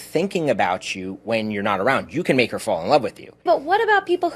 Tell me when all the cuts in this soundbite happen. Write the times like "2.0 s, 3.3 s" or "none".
3.4 s